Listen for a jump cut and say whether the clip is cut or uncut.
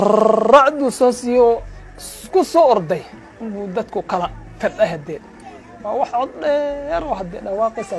uncut